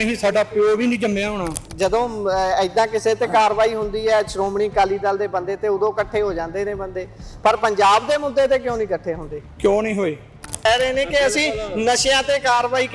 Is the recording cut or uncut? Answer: cut